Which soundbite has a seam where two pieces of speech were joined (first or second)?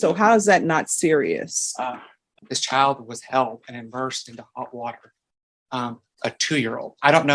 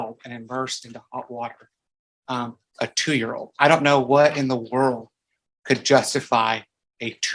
first